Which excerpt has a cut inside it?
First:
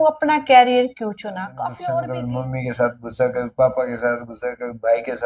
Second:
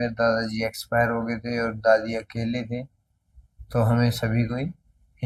first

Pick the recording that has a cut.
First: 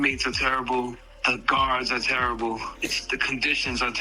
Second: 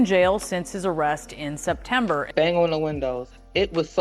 second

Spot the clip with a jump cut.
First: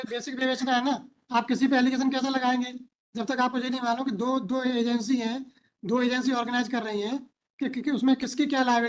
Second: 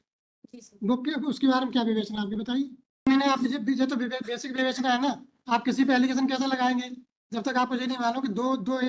second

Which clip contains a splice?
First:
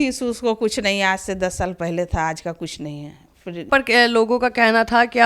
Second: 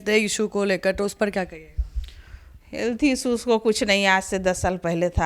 first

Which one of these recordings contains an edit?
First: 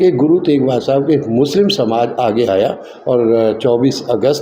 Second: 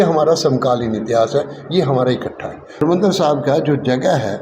second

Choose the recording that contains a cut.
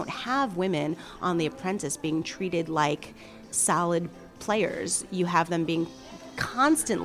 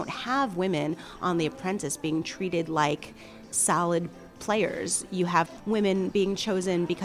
second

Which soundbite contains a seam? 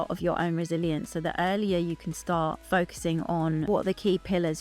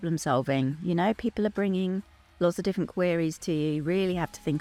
first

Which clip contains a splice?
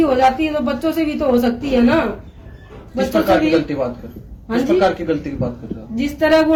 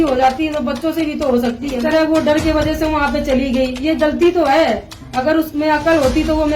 second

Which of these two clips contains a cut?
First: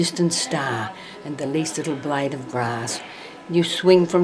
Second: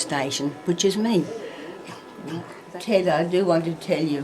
second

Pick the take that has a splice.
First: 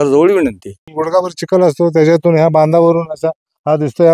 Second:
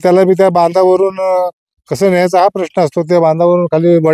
first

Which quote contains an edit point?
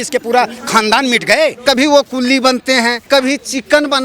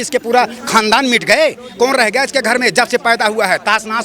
first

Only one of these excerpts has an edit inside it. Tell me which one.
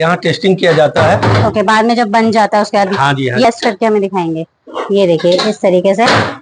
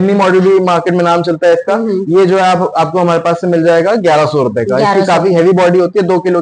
first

